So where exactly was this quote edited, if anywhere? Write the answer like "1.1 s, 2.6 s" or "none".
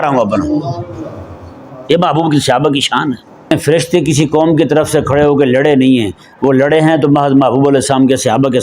3.5 s